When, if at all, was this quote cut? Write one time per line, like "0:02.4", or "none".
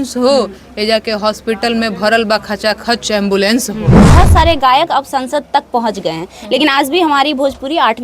0:04.1